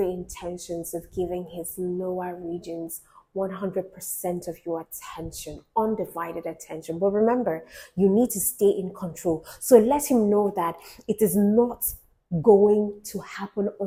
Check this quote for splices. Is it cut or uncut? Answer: uncut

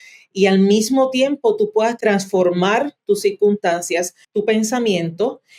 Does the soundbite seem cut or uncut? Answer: cut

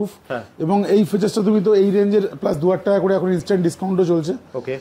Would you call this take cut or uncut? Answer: uncut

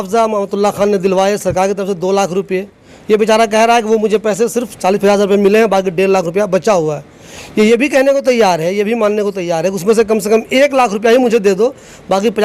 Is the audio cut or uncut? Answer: uncut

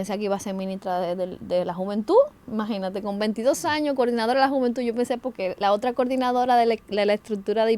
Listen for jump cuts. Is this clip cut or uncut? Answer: uncut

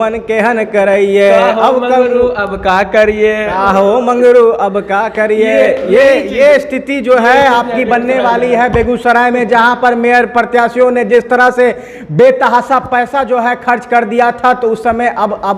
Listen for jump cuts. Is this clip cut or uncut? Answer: uncut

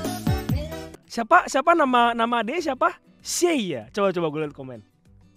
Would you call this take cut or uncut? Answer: uncut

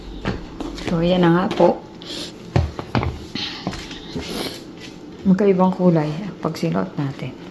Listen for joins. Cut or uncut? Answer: uncut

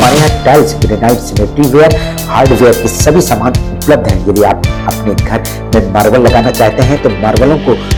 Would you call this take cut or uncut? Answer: uncut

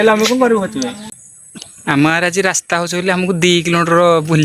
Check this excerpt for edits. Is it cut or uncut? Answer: cut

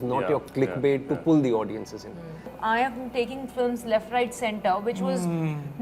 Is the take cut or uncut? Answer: cut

